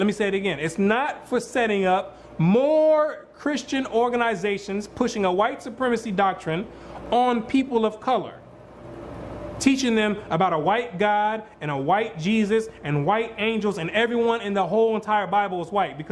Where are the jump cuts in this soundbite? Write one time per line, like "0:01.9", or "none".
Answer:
0:03.6